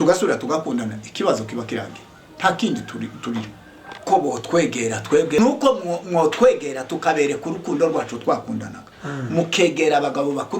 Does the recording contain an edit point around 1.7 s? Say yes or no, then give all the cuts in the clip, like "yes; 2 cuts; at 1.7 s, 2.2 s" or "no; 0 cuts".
no; 1 cut; at 5.4 s